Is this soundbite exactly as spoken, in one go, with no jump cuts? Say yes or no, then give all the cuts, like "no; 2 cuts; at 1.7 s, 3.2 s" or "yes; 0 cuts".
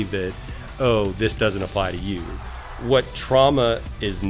no; 1 cut; at 2.5 s